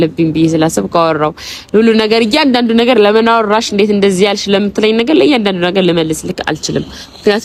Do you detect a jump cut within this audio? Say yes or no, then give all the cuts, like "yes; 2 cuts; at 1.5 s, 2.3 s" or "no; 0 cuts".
no; 0 cuts